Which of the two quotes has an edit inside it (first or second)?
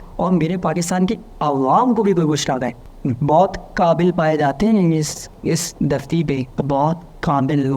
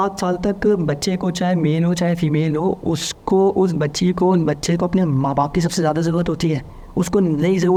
first